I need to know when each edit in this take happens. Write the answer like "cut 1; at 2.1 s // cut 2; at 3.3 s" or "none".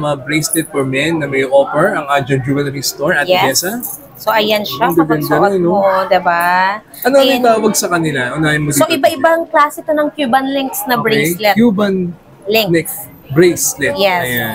none